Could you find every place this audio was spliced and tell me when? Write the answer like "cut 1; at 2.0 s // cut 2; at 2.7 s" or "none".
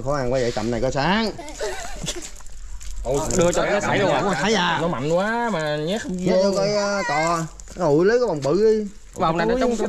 cut 1; at 2.3 s